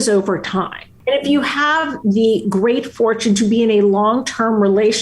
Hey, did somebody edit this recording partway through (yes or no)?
yes